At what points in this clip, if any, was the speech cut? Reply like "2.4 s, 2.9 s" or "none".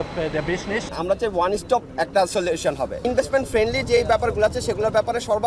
0.9 s, 3.1 s